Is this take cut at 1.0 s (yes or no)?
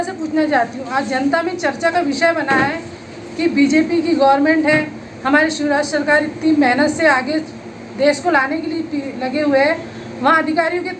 no